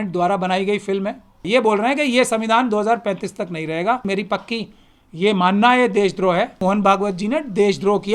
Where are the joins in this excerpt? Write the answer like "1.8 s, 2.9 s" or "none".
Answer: 1.4 s, 4.1 s, 6.6 s